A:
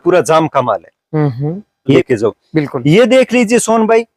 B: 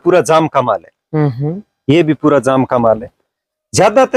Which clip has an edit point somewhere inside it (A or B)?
A